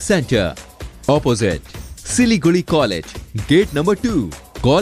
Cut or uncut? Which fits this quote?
uncut